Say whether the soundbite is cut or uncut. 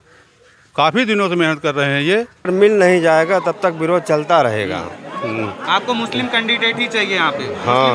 cut